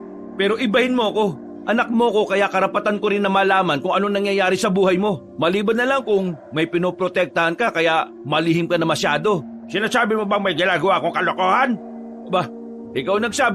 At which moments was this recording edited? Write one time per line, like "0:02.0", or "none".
0:01.5
0:05.3